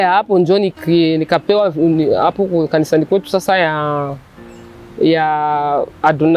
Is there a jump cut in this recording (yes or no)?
no